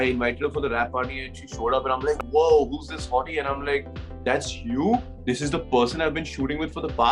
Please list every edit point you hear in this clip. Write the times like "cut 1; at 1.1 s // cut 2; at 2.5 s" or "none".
none